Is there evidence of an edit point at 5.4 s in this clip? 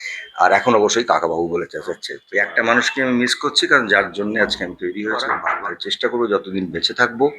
yes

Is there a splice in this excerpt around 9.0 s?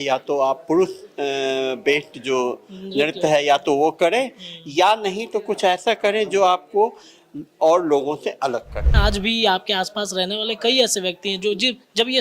yes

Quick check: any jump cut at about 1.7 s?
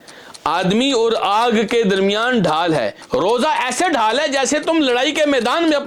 no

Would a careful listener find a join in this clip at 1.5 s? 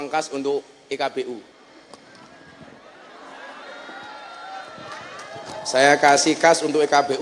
yes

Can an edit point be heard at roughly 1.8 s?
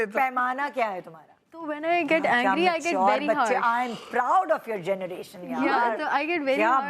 yes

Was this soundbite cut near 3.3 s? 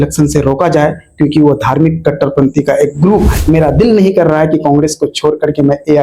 yes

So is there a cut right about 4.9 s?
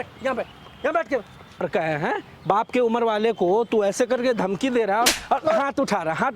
no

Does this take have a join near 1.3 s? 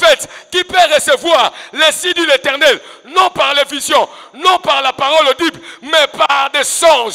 no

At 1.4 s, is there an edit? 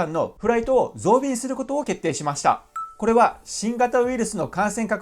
no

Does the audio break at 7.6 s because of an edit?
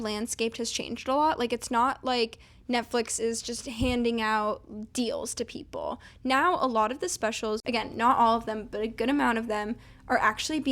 yes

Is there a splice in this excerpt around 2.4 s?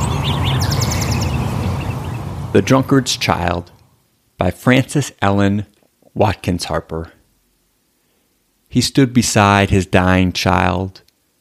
yes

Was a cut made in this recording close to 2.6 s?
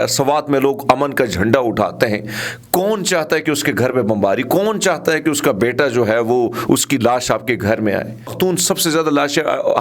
no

